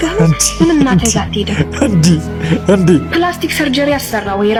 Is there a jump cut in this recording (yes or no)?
no